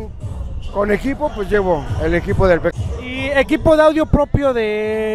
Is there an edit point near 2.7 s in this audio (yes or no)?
yes